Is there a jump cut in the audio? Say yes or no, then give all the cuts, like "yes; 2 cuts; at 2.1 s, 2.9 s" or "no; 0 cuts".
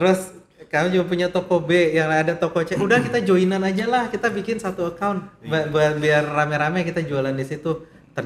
no; 0 cuts